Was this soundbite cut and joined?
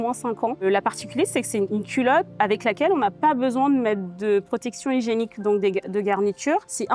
no; 0 cuts

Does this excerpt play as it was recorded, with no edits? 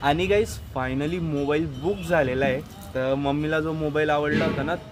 yes; 0 cuts

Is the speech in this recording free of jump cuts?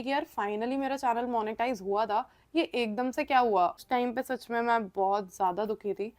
no; 1 cut; at 3.8 s

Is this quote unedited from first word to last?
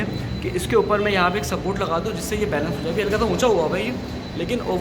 yes; 0 cuts

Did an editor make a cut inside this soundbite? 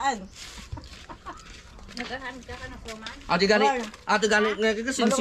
no; 0 cuts

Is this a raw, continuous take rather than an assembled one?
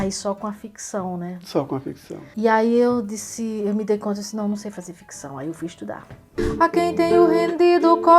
no; 1 cut; at 6.2 s

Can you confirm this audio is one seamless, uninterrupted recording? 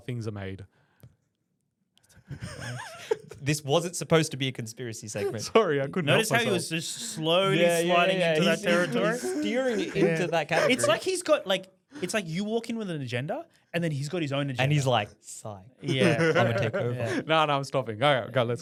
yes; 0 cuts

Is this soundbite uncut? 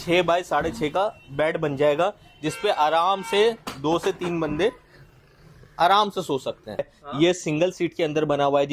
no; 1 cut; at 6.9 s

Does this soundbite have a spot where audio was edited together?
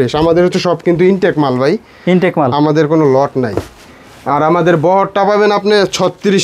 no; 0 cuts

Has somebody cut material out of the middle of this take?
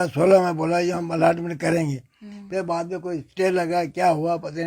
no; 0 cuts

